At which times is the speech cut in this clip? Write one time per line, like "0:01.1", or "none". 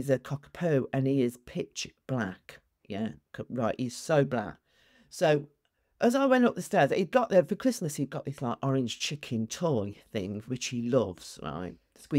none